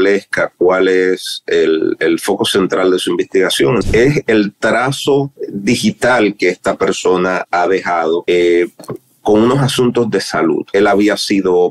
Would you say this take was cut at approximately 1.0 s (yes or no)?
no